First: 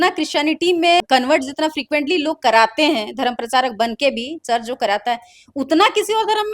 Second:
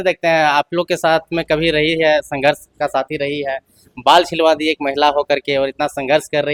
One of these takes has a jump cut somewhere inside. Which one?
first; 1 cut; at 1.0 s

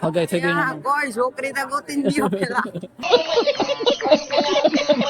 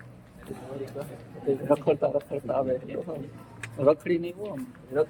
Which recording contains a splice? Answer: first; 1 cut; at 3.0 s

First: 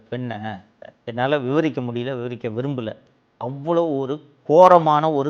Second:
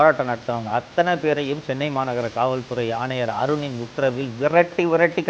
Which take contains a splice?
first; 1 cut; at 0.9 s

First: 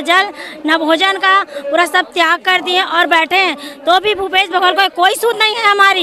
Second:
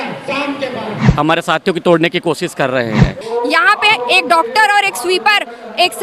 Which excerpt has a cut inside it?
second; 2 cuts; at 1.0 s, 3.2 s

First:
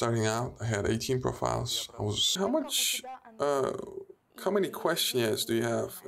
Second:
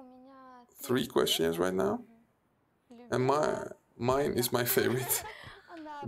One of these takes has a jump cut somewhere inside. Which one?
first; 1 cut; at 2.2 s

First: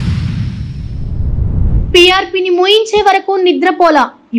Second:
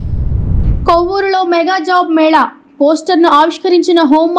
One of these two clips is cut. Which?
first; 1 cut; at 1.7 s

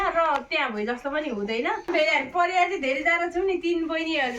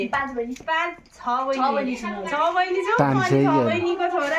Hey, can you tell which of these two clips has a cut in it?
first; 1 cut; at 1.9 s

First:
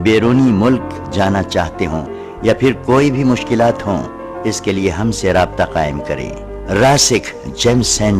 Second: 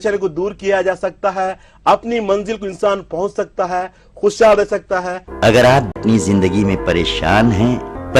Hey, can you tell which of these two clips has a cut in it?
second; 2 cuts; at 5.1 s, 6.0 s

